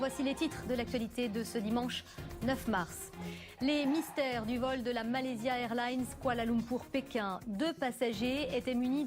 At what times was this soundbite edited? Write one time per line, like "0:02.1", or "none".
0:03.2